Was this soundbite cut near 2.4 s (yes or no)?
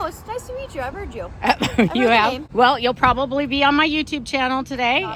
yes